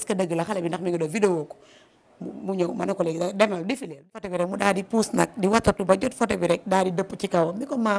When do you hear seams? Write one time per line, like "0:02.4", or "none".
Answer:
0:04.4